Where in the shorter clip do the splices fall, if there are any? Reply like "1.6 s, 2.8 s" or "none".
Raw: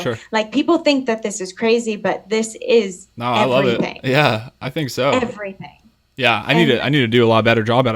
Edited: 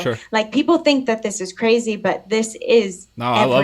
none